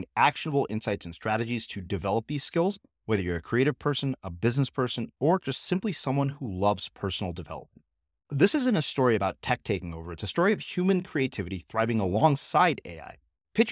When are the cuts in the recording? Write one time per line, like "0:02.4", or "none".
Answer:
none